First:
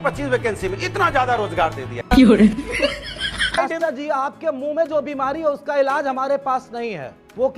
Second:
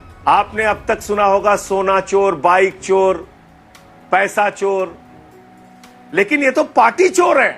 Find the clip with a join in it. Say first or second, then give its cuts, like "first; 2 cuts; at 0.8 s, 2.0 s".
first; 2 cuts; at 2.0 s, 3.6 s